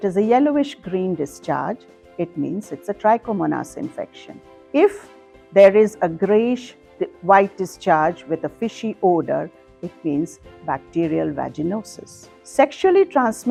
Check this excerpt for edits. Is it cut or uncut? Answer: uncut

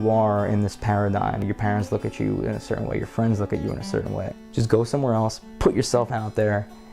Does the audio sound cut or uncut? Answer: cut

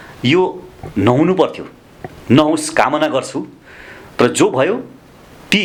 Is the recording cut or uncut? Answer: uncut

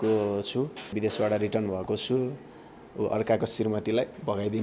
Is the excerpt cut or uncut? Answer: cut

